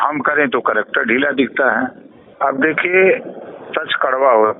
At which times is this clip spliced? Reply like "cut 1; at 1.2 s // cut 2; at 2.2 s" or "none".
cut 1; at 2.2 s